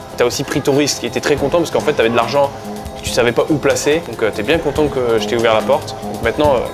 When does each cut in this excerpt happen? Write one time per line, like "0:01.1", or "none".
0:04.1